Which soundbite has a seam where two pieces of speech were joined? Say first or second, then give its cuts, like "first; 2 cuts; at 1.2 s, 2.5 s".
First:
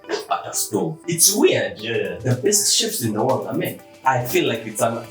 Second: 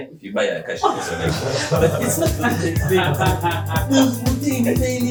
first; 2 cuts; at 1.0 s, 3.9 s